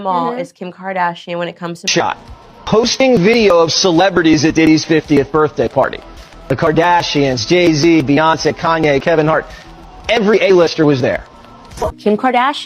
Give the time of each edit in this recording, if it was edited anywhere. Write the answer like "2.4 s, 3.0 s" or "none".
1.9 s, 11.9 s